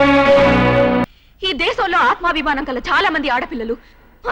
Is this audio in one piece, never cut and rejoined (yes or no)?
no